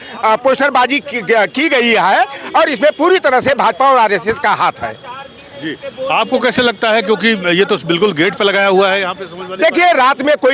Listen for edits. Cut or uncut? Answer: uncut